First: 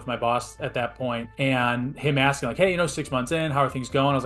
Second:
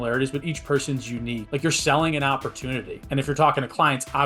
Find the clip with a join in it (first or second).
second